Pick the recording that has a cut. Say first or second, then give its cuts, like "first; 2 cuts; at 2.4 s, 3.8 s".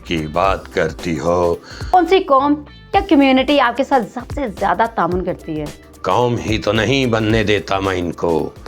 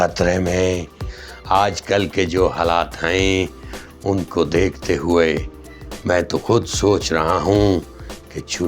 first; 1 cut; at 1.9 s